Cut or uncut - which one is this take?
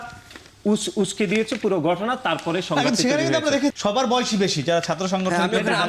cut